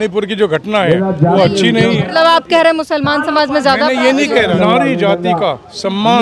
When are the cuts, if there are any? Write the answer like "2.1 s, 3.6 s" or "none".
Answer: 2.0 s, 4.5 s

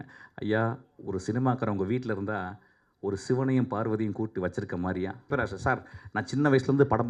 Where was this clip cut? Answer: 5.3 s

